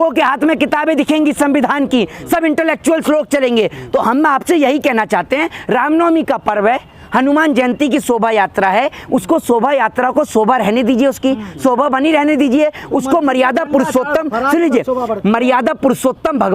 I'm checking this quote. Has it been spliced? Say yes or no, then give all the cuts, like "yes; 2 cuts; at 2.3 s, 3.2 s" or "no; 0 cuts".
no; 0 cuts